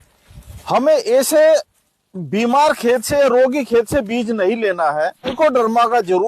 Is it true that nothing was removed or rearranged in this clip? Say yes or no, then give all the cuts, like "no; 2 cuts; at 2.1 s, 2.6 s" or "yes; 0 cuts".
no; 1 cut; at 5.4 s